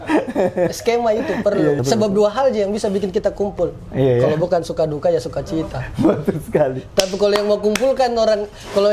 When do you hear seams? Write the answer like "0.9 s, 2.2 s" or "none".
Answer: 1.8 s